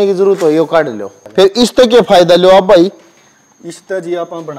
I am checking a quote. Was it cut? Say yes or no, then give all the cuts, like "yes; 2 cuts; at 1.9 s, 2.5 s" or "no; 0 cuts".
yes; 1 cut; at 1.1 s